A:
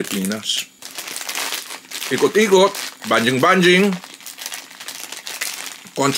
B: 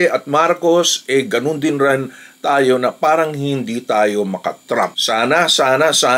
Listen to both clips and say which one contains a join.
B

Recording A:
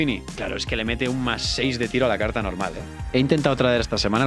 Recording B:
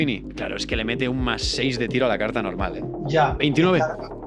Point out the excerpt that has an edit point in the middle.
B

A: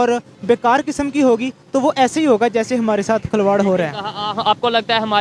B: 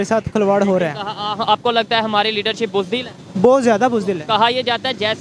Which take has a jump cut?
B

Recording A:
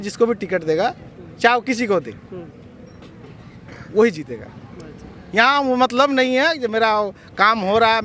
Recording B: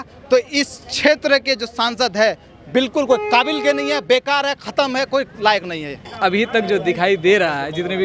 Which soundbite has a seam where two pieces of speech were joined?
B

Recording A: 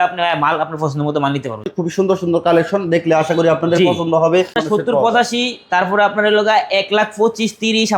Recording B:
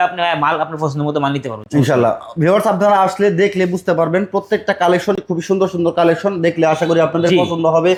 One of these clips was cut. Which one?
A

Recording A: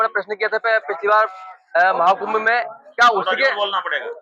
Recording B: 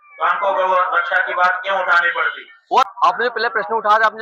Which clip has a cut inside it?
B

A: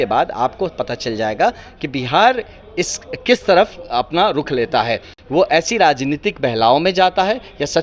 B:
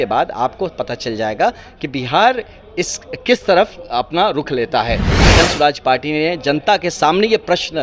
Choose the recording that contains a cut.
B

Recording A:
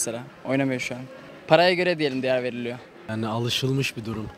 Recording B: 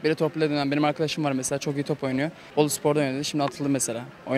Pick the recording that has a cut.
A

